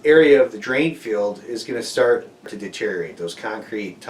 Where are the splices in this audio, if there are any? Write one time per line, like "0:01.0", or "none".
0:02.6